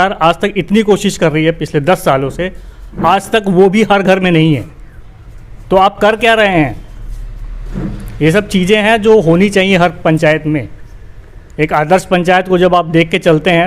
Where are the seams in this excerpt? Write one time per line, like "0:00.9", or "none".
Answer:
none